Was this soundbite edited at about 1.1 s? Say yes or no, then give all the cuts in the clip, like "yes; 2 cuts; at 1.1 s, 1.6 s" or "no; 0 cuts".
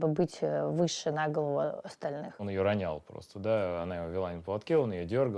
no; 1 cut; at 2.4 s